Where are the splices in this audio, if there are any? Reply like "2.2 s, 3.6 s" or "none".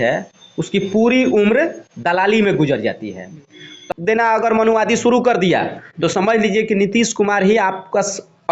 3.8 s